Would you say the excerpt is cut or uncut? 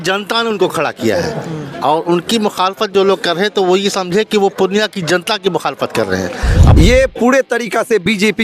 cut